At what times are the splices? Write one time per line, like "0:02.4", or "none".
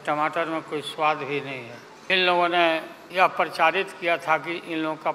0:01.9
0:03.0